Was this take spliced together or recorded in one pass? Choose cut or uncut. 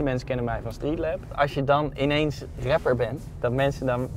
cut